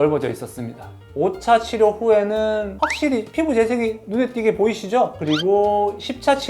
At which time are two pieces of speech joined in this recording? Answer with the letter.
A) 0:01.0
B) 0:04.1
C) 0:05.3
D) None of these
A